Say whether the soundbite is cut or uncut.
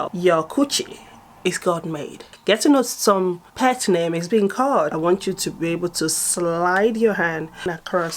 cut